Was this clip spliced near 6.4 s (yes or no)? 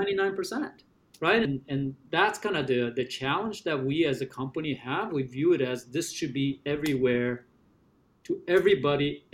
no